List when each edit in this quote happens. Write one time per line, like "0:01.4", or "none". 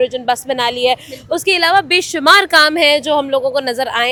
none